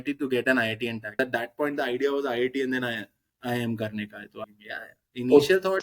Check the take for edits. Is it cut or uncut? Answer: cut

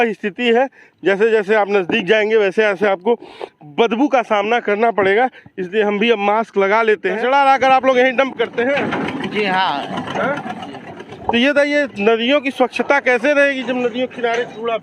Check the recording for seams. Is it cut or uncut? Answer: cut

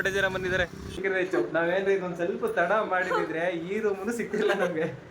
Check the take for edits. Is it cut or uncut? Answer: cut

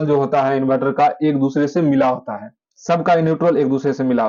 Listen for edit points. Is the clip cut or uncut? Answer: uncut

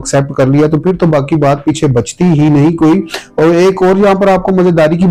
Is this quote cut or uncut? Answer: uncut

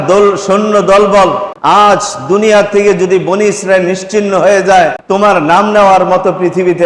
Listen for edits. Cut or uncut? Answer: cut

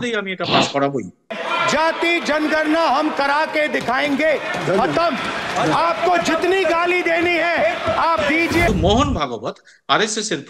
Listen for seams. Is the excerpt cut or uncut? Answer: cut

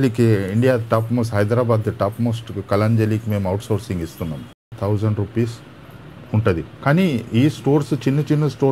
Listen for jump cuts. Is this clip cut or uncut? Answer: cut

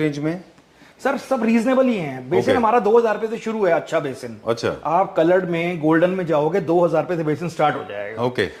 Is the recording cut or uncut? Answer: uncut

